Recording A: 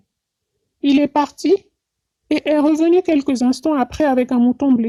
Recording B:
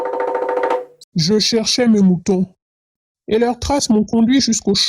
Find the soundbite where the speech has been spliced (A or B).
B